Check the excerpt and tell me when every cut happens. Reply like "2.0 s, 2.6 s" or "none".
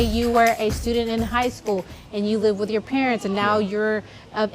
none